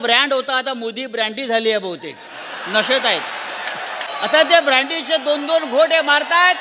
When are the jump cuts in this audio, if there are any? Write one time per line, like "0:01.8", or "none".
0:04.1